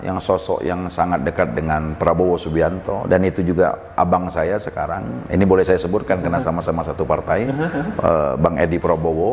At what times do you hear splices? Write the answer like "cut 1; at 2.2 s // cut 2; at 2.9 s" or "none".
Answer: none